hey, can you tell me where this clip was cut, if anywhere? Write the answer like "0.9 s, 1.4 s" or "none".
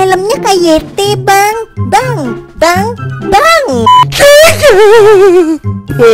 3.9 s